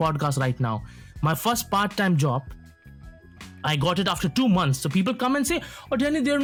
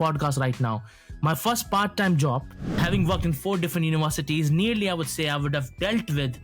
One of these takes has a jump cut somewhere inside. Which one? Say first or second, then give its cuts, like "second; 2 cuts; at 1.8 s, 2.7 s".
second; 1 cut; at 2.8 s